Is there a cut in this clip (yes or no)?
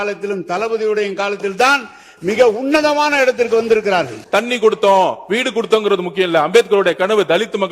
yes